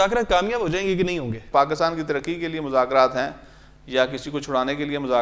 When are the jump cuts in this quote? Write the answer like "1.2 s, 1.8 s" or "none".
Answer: 1.5 s